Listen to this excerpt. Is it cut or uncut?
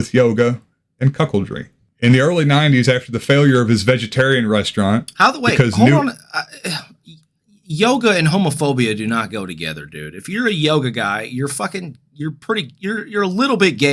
uncut